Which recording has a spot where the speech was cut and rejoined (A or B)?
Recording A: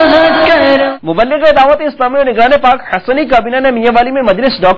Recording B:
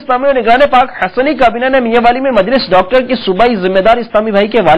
A